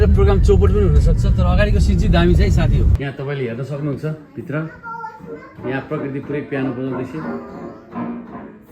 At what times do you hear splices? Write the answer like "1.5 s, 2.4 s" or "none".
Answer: 2.9 s